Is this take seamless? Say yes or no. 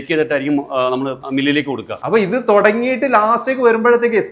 no